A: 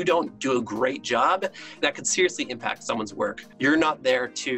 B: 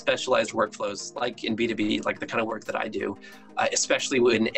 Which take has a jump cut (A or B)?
A